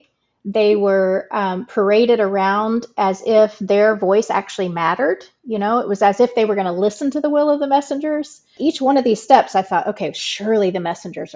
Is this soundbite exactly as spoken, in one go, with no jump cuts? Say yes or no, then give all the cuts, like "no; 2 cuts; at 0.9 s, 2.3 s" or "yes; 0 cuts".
no; 1 cut; at 8.5 s